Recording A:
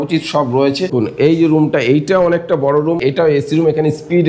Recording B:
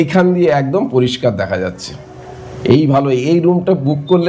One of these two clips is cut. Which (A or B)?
A